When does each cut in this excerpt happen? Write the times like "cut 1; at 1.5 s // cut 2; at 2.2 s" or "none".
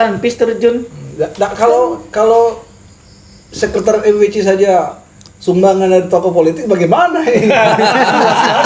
none